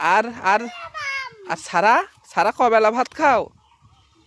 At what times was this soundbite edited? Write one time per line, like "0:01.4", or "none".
none